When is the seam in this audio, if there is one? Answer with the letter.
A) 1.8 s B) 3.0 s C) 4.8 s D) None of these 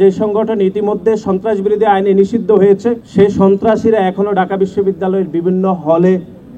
B